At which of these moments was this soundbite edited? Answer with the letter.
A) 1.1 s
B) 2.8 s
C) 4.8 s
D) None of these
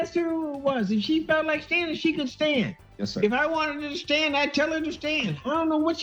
D